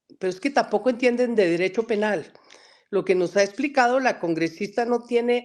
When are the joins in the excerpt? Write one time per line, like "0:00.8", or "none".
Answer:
none